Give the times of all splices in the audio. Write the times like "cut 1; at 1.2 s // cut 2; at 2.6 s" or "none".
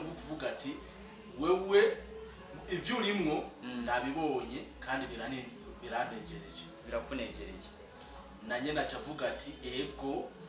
none